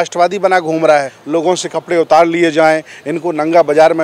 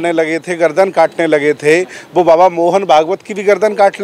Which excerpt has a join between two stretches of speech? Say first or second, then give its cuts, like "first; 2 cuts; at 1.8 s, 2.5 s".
first; 1 cut; at 1.2 s